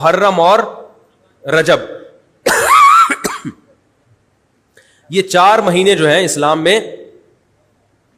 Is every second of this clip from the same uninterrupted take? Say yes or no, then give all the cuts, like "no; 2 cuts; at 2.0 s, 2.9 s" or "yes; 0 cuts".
yes; 0 cuts